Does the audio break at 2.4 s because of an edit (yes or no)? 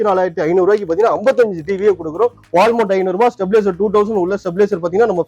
yes